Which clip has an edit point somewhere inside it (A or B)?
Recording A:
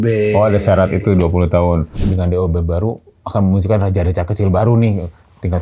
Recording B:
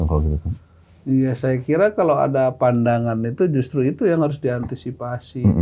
A